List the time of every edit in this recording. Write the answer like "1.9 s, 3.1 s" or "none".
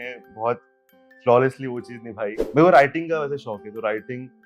2.4 s